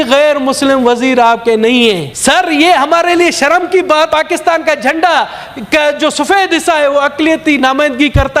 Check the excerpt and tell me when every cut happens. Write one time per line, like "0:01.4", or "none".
0:02.1
0:04.1